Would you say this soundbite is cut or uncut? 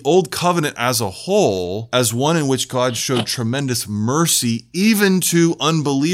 cut